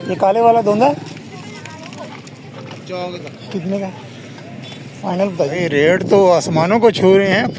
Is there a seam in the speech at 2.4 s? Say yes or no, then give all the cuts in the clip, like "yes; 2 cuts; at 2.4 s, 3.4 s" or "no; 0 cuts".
no; 2 cuts; at 1.1 s, 5.6 s